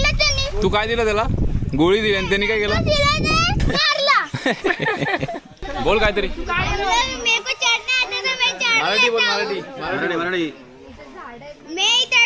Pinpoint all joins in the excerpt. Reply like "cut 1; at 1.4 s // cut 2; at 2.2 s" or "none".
cut 1; at 3.6 s // cut 2; at 5.5 s